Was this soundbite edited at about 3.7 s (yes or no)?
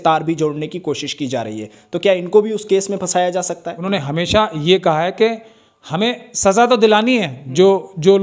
yes